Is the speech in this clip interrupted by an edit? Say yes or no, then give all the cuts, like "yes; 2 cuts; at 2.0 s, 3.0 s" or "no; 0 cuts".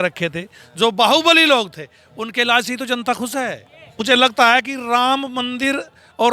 yes; 1 cut; at 4.0 s